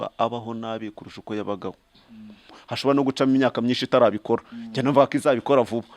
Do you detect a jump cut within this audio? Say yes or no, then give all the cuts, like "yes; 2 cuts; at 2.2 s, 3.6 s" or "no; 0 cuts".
yes; 1 cut; at 2.7 s